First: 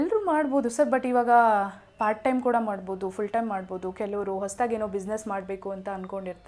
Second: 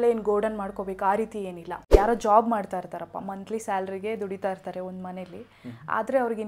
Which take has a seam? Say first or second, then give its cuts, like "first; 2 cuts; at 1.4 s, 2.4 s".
second; 1 cut; at 1.6 s